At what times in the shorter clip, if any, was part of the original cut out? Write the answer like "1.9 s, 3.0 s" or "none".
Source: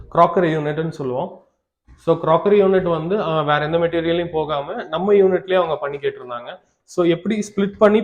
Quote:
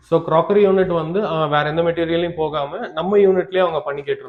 none